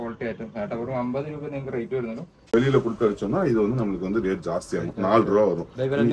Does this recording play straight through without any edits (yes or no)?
no